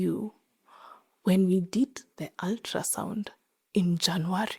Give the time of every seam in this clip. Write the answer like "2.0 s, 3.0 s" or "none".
none